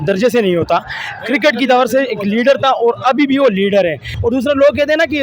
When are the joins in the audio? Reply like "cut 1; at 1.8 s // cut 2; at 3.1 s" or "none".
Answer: cut 1; at 4.1 s